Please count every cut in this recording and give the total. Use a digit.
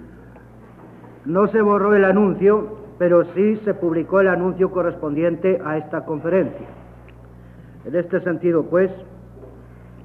1